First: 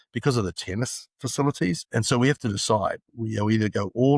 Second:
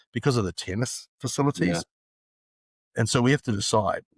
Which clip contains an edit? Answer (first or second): first